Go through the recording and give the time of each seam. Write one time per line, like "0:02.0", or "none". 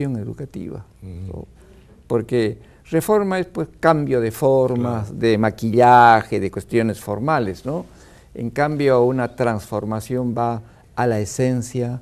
0:09.3